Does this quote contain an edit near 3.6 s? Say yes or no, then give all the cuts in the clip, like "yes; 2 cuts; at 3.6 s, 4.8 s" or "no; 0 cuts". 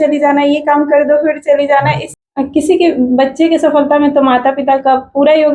no; 1 cut; at 2.1 s